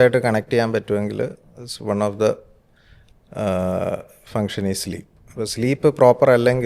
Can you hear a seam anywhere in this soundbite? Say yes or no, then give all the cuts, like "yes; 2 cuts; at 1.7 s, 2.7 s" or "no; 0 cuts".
no; 0 cuts